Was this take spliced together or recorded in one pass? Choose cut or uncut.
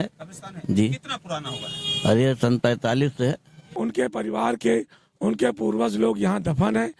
cut